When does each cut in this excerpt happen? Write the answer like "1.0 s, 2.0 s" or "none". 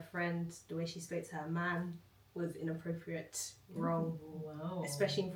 none